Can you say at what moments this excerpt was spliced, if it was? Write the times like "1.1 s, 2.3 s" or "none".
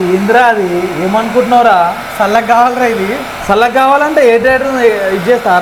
none